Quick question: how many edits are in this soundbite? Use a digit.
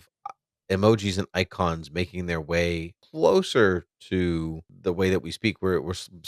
2